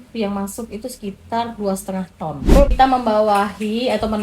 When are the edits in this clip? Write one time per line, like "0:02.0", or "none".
0:02.7

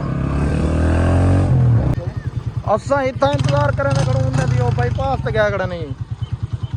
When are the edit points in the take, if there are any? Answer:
0:01.9

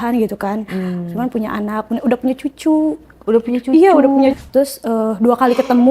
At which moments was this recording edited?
0:04.4

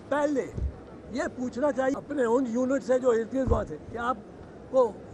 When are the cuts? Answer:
0:01.9

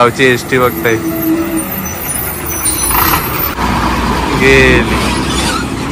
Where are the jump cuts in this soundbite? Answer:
0:03.5

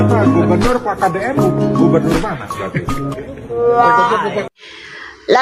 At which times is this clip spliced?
none

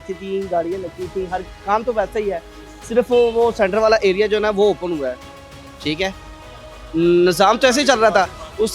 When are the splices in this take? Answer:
none

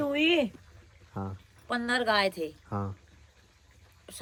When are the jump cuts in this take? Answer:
none

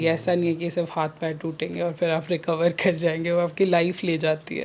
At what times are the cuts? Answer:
none

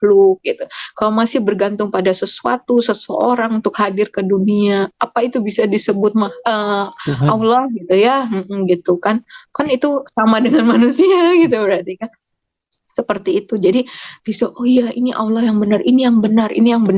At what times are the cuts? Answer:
none

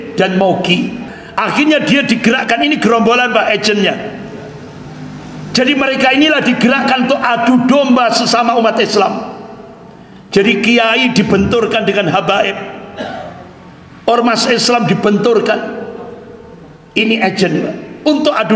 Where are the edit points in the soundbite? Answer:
0:01.1

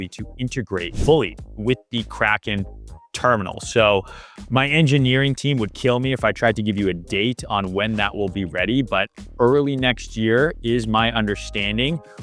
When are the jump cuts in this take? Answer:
0:01.0

